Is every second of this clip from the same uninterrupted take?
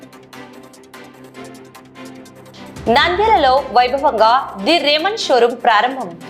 no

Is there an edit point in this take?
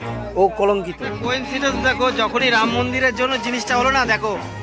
yes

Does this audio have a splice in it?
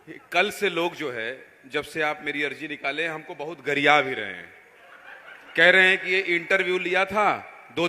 no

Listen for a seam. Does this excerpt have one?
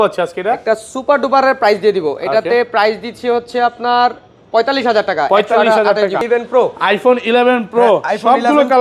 yes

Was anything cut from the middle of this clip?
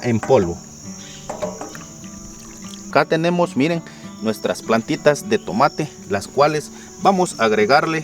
yes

